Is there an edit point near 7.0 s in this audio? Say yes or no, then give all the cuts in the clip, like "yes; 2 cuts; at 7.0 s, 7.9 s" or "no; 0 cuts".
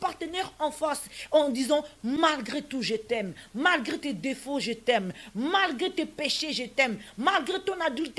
no; 0 cuts